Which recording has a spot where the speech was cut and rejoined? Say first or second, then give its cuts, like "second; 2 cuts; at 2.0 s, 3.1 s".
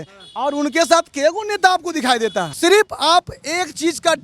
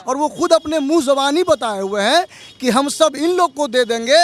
first; 1 cut; at 2.5 s